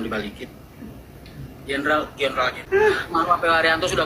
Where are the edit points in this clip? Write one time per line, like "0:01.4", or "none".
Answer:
0:02.6

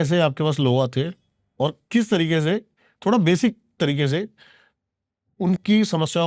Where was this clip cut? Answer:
none

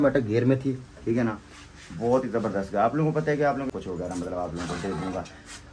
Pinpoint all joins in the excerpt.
0:03.7

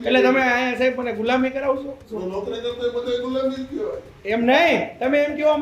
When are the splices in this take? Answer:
0:02.1

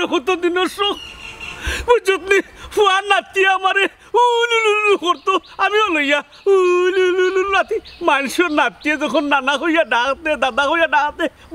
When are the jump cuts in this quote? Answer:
none

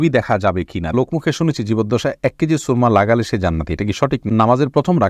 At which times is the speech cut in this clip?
0:00.9
0:04.2

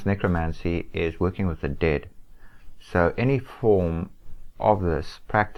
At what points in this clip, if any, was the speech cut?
none

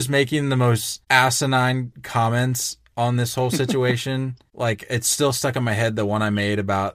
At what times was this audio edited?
0:00.9
0:02.0
0:04.4

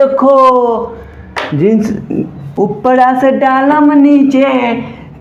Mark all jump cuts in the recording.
none

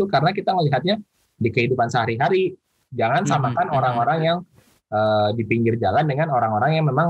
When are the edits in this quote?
0:02.8

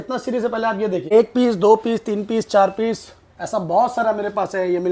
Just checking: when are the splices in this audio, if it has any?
0:01.1

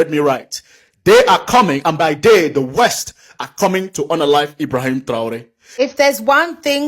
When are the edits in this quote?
0:05.7

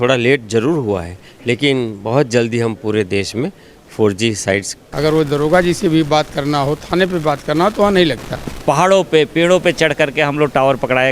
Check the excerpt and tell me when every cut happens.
0:04.8
0:08.5

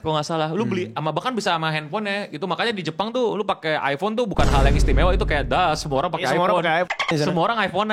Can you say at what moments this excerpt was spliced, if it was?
none

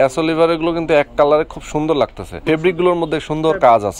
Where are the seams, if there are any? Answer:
0:02.3

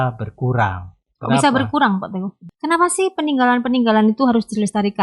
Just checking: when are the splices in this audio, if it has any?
0:02.4

